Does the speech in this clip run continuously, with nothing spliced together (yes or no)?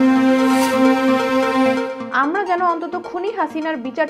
no